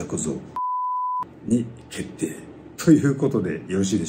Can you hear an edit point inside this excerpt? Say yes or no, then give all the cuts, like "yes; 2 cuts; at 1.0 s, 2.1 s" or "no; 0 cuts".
no; 0 cuts